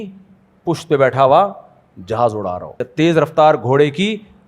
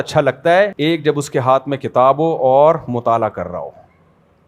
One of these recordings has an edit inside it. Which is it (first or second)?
first